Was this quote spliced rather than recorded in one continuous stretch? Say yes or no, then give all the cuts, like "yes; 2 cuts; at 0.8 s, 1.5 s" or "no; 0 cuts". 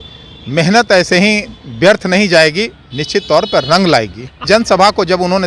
yes; 1 cut; at 4.4 s